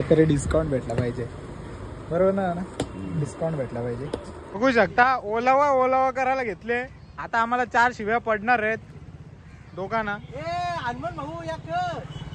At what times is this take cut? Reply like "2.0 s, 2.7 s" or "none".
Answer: 4.4 s